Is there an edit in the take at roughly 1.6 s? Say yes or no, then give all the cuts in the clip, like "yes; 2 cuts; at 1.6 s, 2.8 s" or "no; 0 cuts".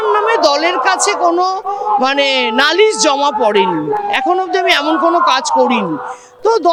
no; 0 cuts